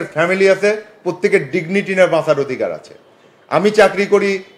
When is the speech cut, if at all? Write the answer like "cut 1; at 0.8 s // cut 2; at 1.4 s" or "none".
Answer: none

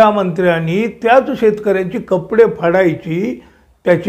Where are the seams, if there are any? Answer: none

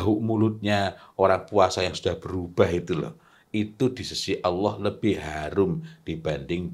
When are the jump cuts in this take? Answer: none

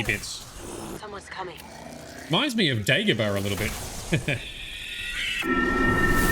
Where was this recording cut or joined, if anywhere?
cut 1; at 1.0 s

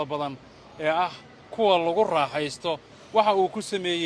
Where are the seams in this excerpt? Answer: cut 1; at 2.9 s

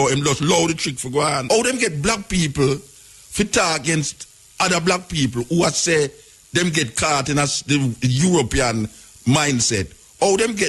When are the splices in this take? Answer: cut 1; at 1.4 s

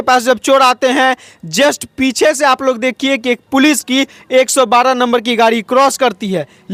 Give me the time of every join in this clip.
none

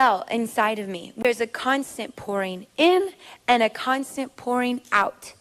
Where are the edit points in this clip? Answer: cut 1; at 1.1 s

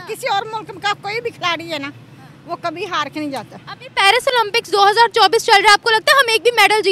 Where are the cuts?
none

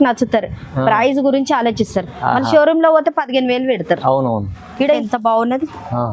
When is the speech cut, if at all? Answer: cut 1; at 5.0 s

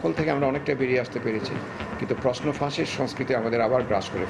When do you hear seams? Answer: none

